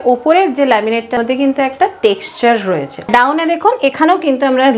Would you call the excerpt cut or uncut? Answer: cut